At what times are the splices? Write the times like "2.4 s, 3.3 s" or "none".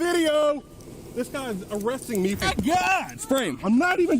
2.4 s